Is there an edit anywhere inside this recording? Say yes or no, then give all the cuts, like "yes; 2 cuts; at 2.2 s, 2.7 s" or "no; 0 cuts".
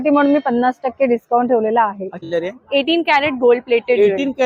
yes; 1 cut; at 2.2 s